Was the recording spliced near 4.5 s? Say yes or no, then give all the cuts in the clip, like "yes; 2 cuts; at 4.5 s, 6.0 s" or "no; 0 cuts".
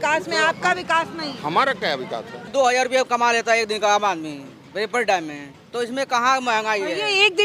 no; 1 cut; at 2.5 s